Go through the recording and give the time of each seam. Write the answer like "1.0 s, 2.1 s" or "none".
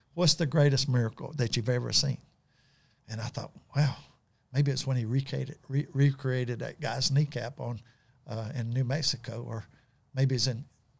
none